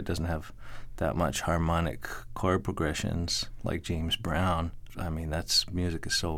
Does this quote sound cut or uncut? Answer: uncut